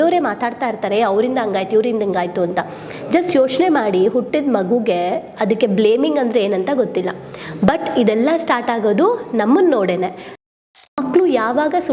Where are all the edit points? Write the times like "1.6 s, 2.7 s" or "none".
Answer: 10.4 s